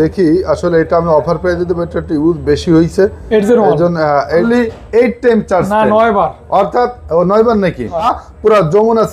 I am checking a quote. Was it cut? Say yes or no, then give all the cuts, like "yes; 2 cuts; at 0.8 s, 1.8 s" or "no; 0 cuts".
yes; 2 cuts; at 4.4 s, 8.1 s